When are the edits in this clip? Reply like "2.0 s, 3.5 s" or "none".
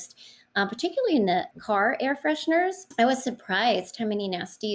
1.5 s, 2.8 s